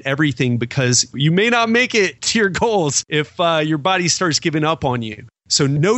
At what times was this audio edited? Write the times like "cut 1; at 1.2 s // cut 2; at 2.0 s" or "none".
cut 1; at 3.0 s